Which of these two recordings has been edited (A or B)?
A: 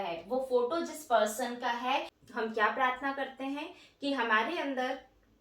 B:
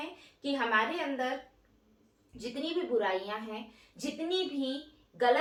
A